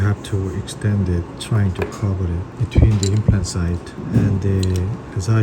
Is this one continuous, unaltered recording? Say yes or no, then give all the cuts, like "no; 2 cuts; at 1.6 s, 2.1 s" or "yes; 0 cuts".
no; 3 cuts; at 1.4 s, 2.5 s, 3.9 s